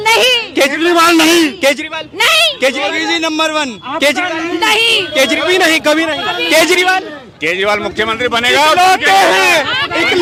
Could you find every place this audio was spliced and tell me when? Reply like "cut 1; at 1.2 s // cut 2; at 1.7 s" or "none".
none